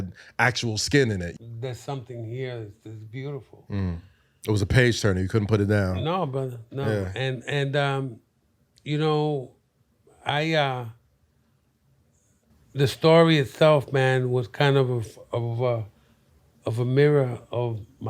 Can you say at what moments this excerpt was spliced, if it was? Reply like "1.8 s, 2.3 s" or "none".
1.3 s